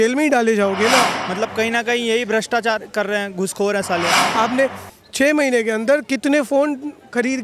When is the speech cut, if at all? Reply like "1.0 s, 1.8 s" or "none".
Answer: 1.1 s, 4.2 s